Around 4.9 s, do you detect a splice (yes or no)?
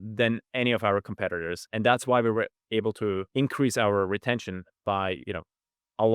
no